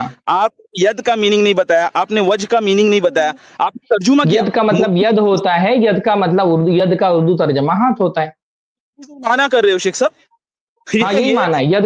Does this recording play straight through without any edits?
yes; 0 cuts

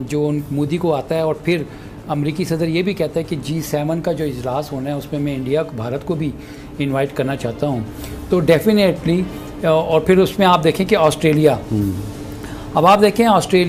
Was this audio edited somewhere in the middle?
no; 0 cuts

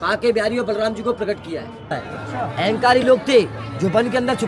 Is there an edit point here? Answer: yes; 1 cut; at 2.0 s

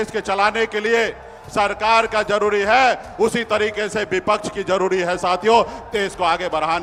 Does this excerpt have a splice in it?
no; 0 cuts

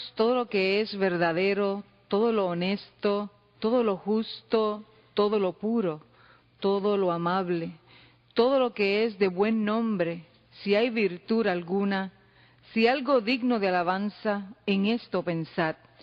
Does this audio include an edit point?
no; 0 cuts

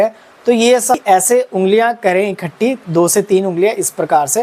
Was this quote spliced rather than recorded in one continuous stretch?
yes; 1 cut; at 1.0 s

